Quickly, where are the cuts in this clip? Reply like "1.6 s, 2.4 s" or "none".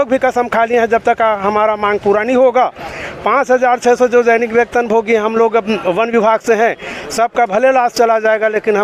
none